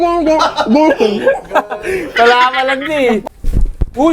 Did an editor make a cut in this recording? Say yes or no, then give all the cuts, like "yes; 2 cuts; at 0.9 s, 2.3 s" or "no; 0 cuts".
yes; 1 cut; at 3.2 s